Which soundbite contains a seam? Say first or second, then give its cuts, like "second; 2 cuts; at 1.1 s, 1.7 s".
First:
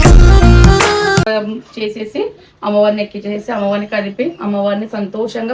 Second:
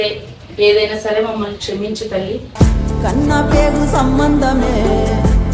first; 1 cut; at 1.3 s